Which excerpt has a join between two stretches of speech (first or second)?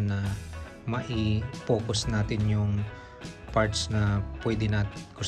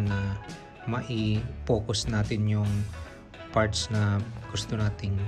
second